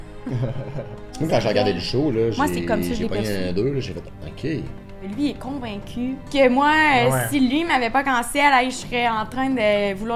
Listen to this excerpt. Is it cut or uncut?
cut